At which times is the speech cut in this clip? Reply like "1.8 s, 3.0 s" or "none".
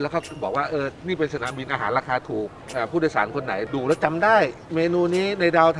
2.6 s, 3.7 s